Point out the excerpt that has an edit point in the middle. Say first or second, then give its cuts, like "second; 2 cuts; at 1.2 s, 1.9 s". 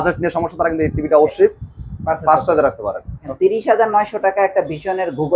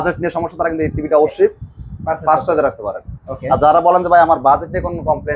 first; 1 cut; at 3.3 s